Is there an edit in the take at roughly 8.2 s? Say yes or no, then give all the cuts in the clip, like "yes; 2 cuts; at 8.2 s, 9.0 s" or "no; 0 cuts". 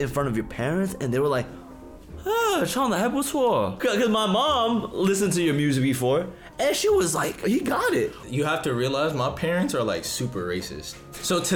yes; 3 cuts; at 3.8 s, 7.4 s, 8.2 s